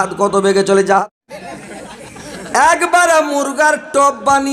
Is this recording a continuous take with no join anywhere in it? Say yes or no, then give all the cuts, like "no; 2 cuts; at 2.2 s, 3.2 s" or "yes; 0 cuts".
no; 1 cut; at 1.0 s